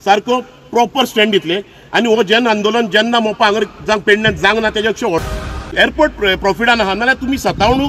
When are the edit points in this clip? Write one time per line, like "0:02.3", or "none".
0:05.2